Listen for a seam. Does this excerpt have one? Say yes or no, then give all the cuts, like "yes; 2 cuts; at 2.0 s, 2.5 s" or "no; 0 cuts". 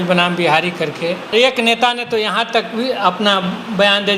yes; 1 cut; at 1.3 s